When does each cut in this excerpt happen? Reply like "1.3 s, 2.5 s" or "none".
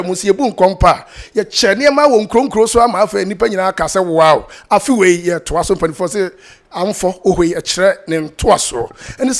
none

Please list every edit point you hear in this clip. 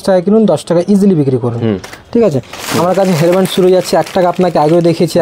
2.6 s

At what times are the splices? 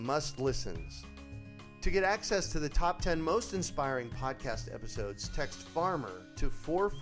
none

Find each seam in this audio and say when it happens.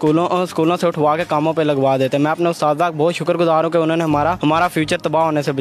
4.4 s

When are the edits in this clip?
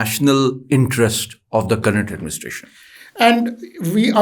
none

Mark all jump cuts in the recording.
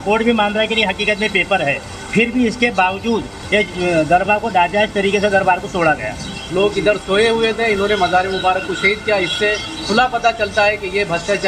6.4 s

